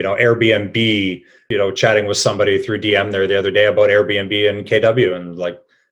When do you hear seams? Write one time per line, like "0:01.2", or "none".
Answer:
0:01.3